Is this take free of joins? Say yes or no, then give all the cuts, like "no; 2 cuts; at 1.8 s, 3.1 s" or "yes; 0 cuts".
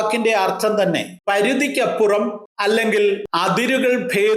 no; 3 cuts; at 1.1 s, 2.5 s, 3.3 s